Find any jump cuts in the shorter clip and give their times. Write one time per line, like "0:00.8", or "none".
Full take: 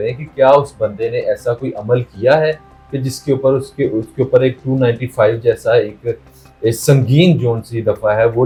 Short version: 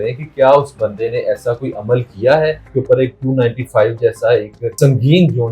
0:02.6
0:04.7